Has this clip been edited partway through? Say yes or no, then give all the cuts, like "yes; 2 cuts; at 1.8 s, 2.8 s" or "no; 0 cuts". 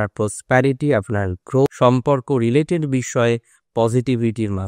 yes; 1 cut; at 1.7 s